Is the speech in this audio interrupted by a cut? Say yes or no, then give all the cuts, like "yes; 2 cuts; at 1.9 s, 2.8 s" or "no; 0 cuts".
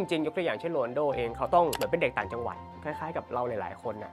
no; 0 cuts